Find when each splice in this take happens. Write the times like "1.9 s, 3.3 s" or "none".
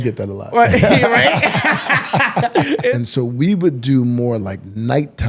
2.9 s